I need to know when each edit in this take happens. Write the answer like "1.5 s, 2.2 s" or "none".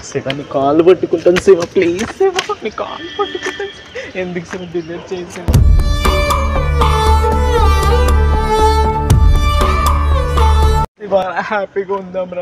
11.1 s